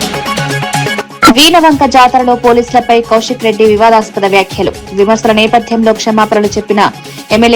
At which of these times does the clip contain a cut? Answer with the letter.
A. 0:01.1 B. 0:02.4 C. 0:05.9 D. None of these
A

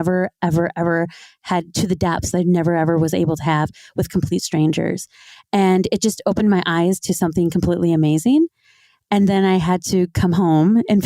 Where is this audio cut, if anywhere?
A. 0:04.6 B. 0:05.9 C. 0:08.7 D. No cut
D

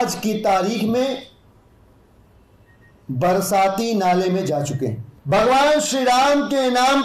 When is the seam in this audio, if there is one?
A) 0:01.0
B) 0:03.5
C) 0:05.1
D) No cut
C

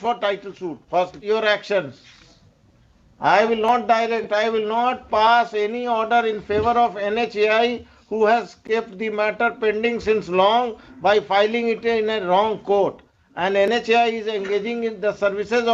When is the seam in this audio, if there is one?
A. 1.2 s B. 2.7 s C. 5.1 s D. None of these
A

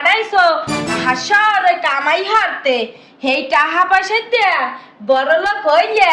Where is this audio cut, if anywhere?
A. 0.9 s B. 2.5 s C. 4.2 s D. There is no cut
A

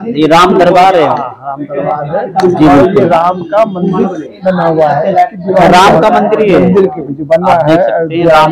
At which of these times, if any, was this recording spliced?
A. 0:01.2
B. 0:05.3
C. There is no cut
C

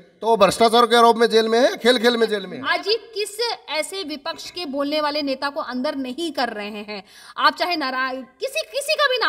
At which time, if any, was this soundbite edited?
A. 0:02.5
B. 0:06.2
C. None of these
A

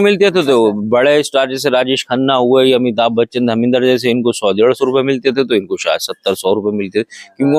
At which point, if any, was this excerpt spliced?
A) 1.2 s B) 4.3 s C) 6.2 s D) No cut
D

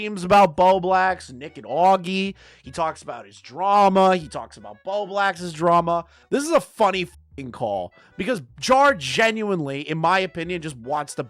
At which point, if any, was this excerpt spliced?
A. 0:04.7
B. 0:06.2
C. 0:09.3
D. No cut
B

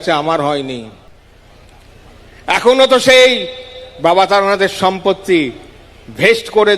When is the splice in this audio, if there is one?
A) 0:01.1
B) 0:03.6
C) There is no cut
A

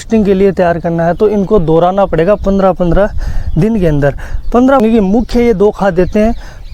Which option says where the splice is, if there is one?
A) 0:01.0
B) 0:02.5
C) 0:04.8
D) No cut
C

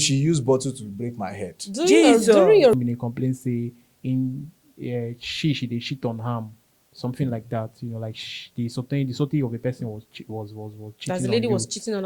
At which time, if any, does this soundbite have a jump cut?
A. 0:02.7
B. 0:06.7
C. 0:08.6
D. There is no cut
A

